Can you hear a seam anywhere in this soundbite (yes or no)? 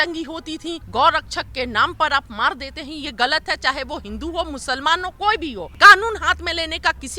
yes